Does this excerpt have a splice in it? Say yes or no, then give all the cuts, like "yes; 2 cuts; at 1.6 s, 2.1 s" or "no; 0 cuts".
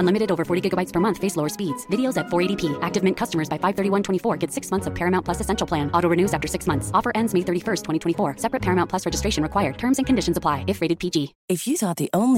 no; 0 cuts